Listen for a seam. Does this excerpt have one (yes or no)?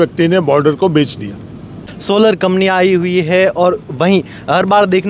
yes